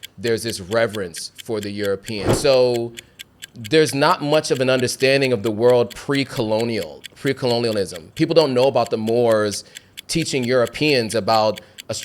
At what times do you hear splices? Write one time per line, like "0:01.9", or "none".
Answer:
0:02.3